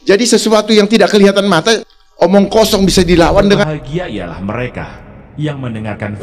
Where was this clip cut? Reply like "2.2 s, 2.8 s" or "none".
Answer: 3.7 s